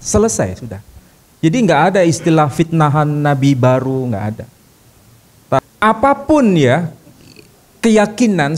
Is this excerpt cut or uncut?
cut